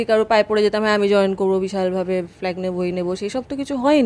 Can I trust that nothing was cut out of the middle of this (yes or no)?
yes